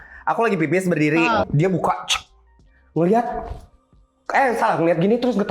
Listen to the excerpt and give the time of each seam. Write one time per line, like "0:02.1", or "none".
0:01.5